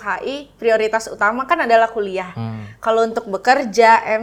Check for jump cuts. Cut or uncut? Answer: uncut